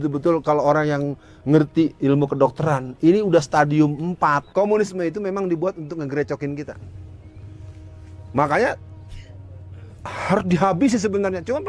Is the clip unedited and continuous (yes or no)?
no